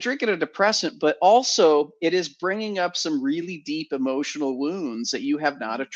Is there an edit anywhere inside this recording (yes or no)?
no